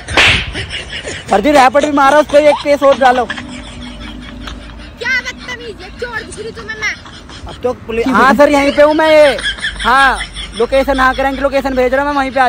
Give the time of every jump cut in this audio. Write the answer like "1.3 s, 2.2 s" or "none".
none